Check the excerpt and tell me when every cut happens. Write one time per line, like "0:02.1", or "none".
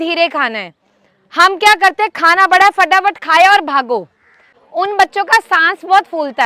0:04.5